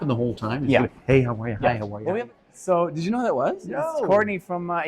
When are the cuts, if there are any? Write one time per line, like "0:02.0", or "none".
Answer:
0:02.2

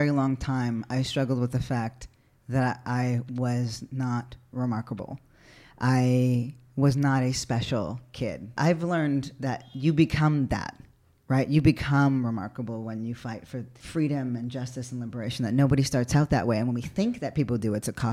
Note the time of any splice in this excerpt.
0:08.5
0:09.7
0:13.8

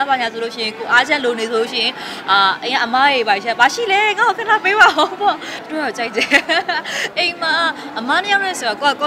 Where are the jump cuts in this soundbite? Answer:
0:05.6

